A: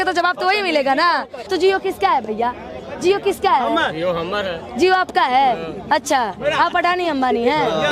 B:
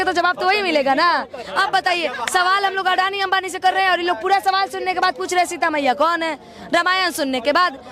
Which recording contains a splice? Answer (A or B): A